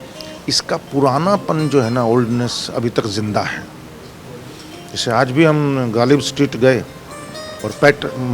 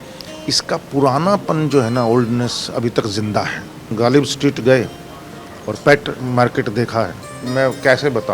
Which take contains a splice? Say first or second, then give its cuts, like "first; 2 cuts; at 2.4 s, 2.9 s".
second; 2 cuts; at 3.9 s, 7.5 s